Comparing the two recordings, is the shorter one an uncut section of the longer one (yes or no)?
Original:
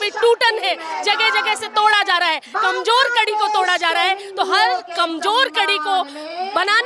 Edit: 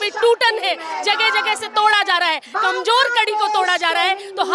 yes